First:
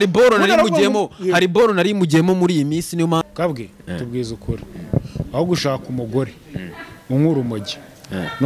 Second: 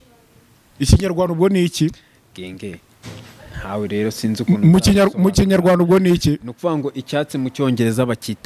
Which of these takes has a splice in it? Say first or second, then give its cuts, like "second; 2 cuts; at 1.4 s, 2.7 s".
first; 1 cut; at 3.3 s